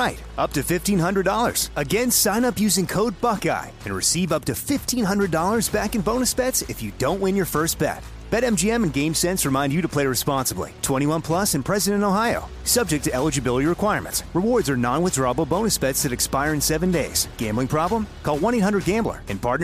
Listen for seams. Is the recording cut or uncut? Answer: uncut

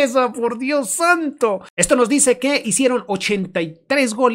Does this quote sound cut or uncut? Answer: cut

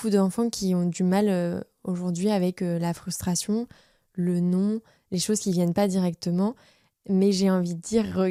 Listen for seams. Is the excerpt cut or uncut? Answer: uncut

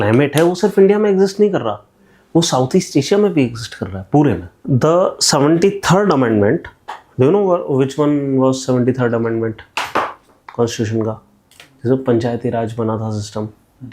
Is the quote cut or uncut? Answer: cut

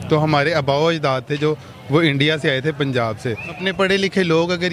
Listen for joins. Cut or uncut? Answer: cut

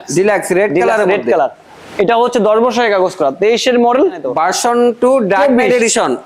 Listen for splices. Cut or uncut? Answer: cut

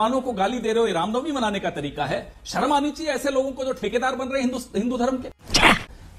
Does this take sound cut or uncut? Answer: uncut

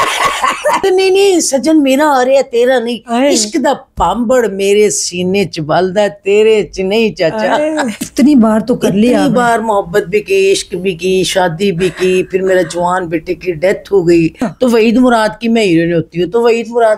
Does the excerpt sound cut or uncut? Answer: cut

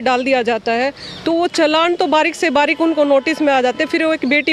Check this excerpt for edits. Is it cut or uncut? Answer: uncut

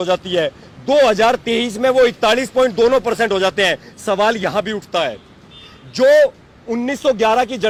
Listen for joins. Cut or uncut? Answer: uncut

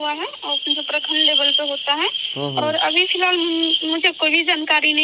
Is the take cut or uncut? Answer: uncut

